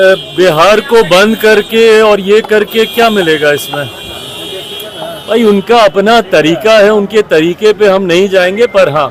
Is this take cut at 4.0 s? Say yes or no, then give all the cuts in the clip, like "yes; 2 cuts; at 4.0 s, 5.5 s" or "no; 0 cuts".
no; 0 cuts